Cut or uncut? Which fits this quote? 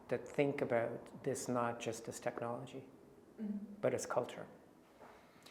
uncut